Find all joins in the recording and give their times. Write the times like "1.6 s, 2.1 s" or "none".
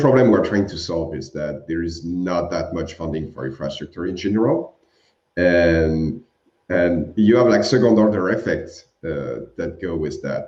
none